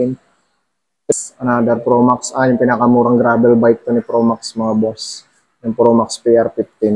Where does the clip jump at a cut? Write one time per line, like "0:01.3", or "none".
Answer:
0:01.1

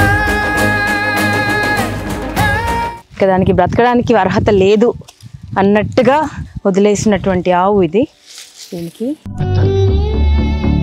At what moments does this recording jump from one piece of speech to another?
0:03.0

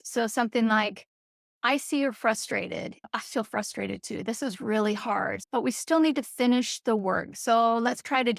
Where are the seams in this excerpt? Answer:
0:03.1
0:05.4

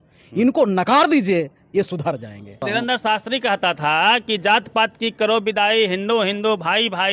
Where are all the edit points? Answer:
0:02.6

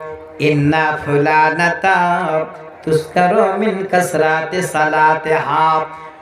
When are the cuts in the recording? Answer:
none

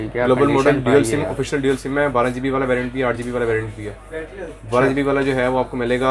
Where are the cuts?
none

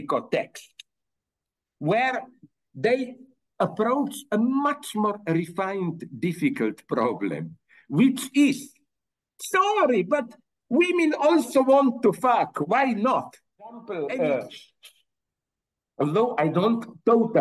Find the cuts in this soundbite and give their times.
0:13.8

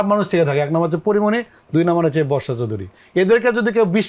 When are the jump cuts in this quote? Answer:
none

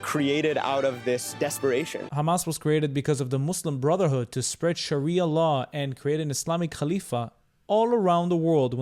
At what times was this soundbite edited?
0:02.0

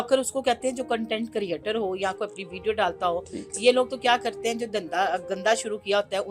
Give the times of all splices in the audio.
none

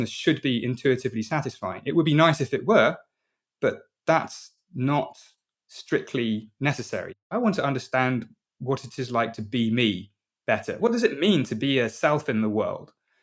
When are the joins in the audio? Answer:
0:07.2

